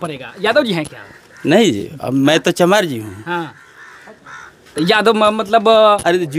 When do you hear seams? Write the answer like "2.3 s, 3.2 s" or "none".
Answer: none